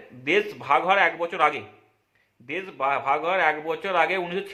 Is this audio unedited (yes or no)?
yes